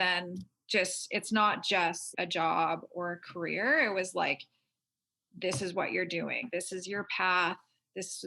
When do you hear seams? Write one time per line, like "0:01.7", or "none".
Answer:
0:02.1
0:06.4